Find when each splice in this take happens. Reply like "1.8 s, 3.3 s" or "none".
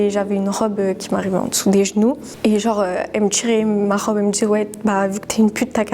none